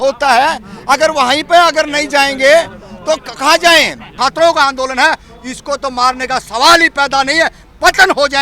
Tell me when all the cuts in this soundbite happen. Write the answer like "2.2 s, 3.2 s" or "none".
4.1 s